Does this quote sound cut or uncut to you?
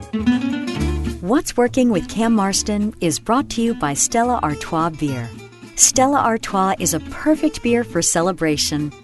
cut